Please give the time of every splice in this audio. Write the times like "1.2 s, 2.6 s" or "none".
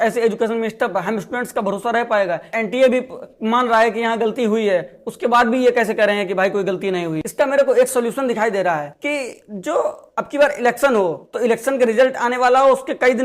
2.5 s, 7.2 s